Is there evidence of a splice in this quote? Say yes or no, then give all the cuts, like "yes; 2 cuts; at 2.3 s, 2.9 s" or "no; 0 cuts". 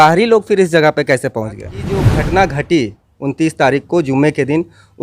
yes; 1 cut; at 2.1 s